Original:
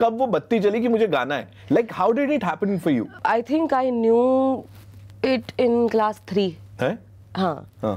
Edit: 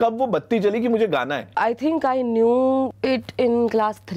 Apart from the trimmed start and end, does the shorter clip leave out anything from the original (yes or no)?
yes